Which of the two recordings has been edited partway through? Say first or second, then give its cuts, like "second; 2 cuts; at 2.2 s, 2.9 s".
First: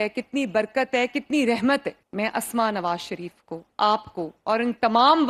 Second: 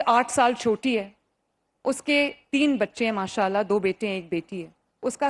first; 1 cut; at 2.0 s